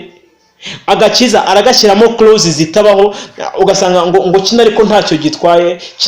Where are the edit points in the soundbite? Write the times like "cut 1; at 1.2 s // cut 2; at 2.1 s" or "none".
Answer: none